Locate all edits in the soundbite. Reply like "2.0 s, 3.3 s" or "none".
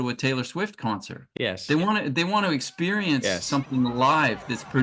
1.2 s